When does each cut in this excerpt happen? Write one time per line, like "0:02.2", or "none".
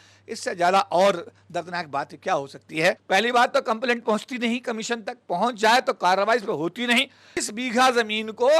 0:03.0
0:07.3